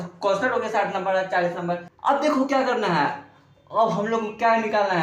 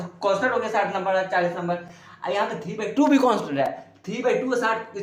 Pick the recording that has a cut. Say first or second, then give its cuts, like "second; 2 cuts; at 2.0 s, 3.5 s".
first; 1 cut; at 1.9 s